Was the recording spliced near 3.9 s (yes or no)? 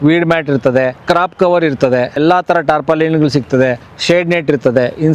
yes